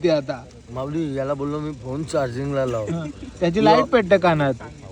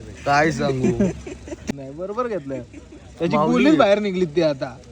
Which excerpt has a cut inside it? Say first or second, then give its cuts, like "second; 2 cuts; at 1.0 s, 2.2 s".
second; 1 cut; at 1.6 s